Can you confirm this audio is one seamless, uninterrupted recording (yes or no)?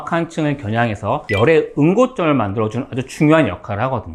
yes